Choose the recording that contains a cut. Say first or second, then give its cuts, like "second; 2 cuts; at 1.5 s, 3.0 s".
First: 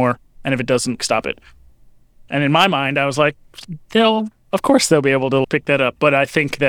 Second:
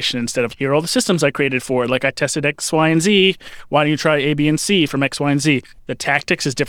second; 1 cut; at 5.7 s